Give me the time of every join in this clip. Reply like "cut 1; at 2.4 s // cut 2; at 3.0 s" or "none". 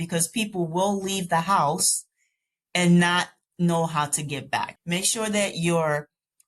cut 1; at 4.7 s